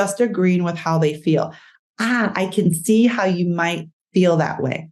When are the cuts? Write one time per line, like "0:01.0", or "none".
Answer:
none